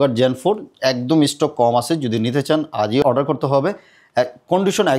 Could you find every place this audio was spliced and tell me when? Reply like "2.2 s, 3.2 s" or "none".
3.0 s